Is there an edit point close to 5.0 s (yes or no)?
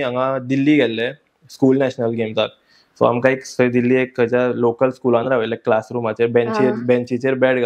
no